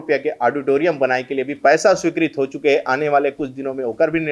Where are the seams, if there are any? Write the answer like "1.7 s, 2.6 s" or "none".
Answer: none

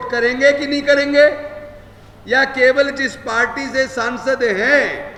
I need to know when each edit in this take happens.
none

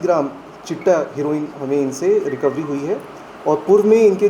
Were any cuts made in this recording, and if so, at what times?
none

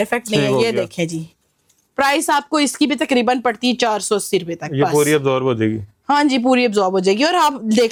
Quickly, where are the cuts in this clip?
none

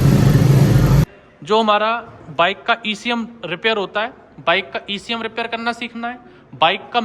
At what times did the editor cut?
1.0 s

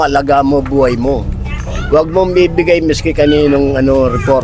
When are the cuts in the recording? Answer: none

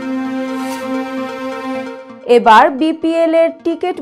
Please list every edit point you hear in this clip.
2.0 s

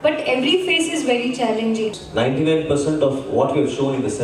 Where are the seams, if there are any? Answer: 2.0 s

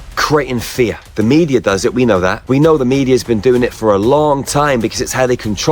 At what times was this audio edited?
1.0 s, 2.4 s

